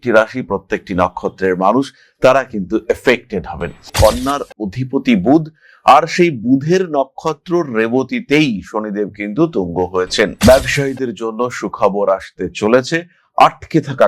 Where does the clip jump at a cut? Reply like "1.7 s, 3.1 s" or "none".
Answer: 3.9 s